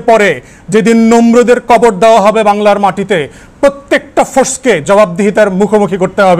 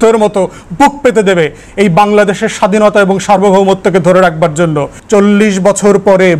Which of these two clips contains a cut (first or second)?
second